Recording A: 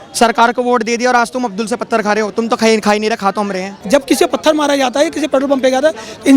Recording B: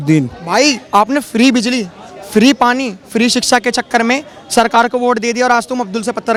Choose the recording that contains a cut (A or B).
A